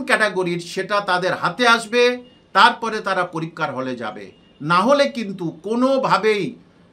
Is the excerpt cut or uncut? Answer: uncut